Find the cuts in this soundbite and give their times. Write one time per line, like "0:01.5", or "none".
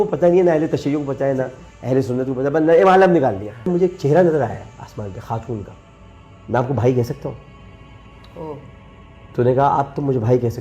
0:03.7